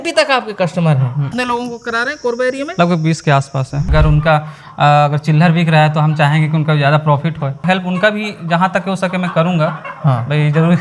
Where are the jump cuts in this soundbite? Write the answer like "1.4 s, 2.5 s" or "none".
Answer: 1.4 s, 3.9 s, 7.6 s